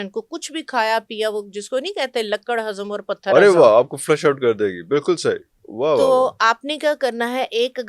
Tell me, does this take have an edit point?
no; 0 cuts

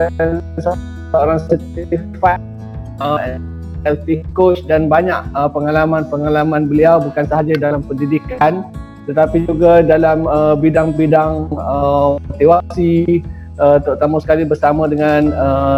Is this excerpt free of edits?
yes; 0 cuts

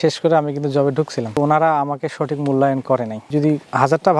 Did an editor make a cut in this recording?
yes; 1 cut; at 1.4 s

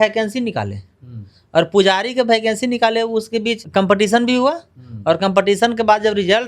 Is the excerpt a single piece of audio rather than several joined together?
no; 1 cut; at 3.6 s

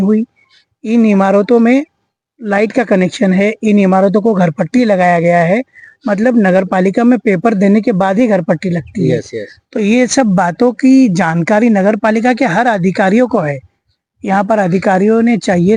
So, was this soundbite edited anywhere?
no; 0 cuts

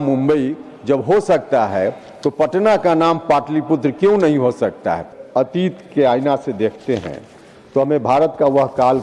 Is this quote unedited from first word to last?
no; 1 cut; at 5.2 s

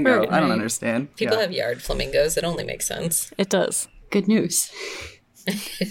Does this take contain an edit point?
yes; 1 cut; at 3.9 s

